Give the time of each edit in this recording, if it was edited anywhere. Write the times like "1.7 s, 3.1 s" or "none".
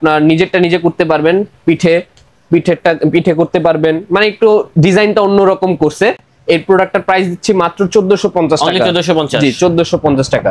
none